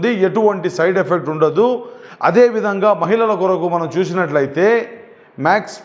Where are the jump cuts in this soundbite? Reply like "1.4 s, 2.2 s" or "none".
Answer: none